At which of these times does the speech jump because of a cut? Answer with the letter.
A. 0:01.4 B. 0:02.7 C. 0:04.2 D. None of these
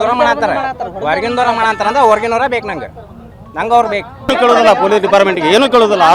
C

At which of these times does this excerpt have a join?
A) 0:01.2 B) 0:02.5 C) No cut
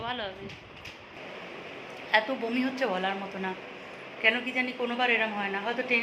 A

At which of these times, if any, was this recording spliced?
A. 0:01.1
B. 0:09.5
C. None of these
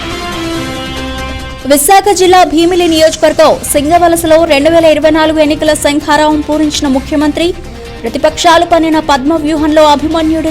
A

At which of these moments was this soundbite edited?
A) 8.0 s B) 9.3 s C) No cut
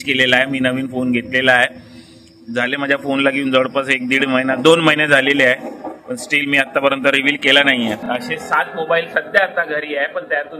A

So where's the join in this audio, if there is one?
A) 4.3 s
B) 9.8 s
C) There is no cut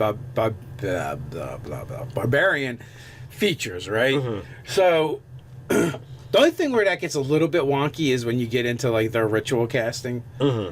A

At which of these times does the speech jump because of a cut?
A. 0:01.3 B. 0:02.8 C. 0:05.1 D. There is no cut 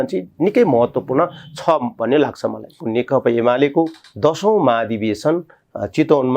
B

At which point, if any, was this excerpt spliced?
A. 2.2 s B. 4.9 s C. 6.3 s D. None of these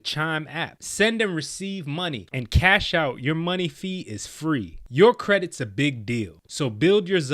A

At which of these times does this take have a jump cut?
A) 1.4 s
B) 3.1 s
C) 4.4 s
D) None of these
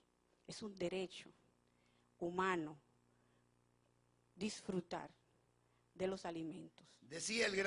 C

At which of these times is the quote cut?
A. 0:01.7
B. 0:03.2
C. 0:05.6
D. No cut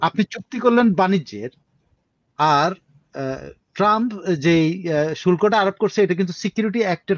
D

